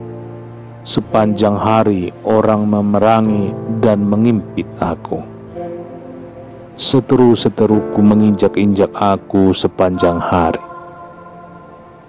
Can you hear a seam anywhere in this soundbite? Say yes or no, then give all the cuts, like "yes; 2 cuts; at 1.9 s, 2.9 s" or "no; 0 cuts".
yes; 1 cut; at 0.9 s